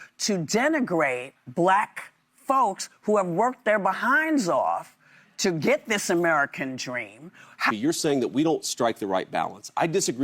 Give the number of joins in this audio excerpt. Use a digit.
2